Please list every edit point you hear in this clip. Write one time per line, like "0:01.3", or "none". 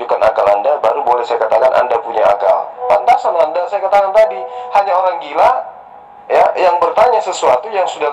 none